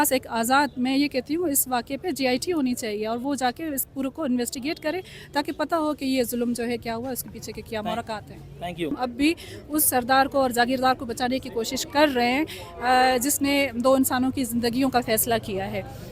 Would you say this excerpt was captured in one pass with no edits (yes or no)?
no